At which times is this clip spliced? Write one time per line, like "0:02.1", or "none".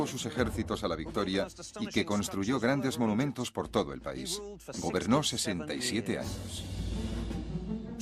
none